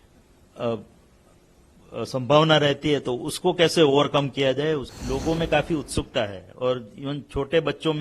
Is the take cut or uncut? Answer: cut